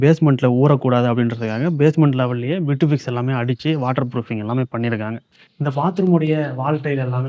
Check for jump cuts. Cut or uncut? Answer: cut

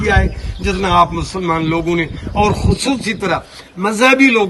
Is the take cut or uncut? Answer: uncut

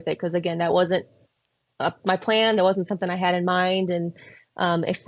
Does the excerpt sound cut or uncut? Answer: uncut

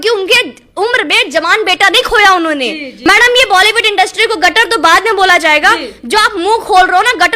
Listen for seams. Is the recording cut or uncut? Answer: cut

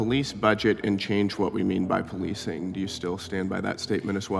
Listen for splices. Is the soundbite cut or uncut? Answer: uncut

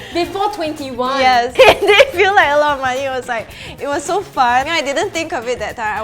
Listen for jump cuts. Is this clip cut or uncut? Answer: cut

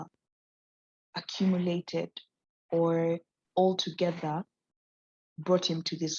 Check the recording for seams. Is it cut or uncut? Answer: cut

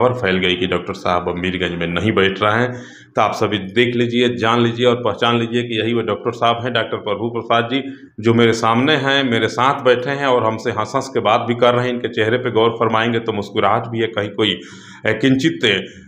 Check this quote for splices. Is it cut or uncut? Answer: uncut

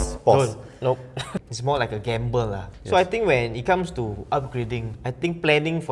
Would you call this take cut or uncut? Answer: cut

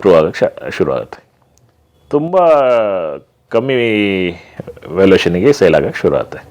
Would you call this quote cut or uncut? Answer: uncut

